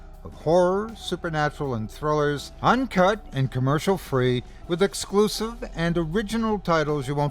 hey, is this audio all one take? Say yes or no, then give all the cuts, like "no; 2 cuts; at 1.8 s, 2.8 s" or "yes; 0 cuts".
no; 2 cuts; at 2.5 s, 4.5 s